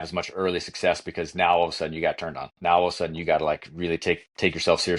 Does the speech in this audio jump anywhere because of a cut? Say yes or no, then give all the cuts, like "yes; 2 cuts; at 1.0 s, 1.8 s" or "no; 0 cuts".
no; 0 cuts